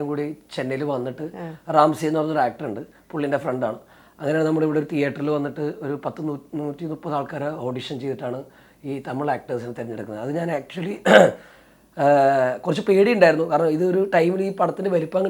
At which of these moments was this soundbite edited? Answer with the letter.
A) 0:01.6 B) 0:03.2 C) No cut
C